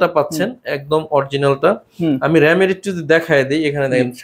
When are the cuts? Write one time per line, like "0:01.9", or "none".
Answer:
none